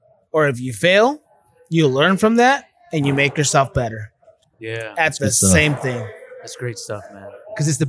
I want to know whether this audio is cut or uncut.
uncut